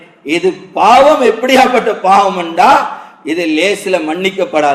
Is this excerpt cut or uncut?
uncut